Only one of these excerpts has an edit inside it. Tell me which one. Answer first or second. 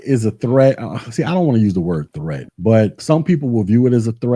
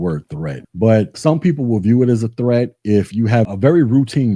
second